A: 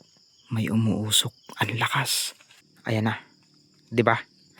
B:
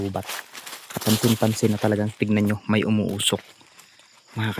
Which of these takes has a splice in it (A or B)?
A